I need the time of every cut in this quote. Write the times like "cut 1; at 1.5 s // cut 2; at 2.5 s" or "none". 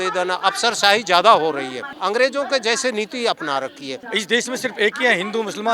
cut 1; at 1.8 s // cut 2; at 4.0 s